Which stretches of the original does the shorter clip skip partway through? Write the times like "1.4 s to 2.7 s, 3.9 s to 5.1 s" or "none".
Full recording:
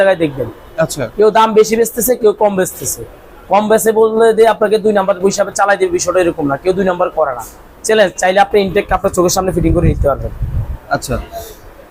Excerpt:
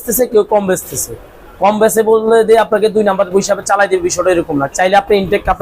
6.6 s to 8.1 s